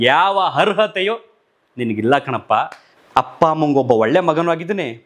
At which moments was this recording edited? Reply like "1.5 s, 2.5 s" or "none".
2.8 s